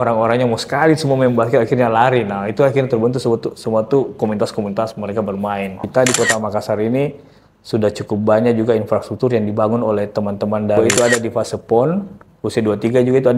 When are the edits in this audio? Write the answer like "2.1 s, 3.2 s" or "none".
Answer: 5.8 s, 10.8 s